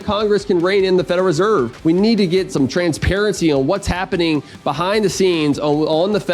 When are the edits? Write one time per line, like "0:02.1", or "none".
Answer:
0:01.7
0:02.5